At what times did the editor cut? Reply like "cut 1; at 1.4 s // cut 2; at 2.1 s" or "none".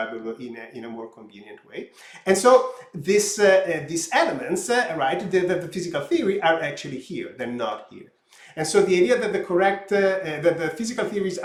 none